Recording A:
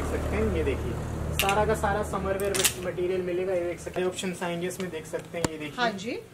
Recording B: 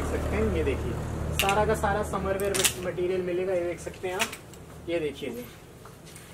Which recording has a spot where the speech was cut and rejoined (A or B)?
A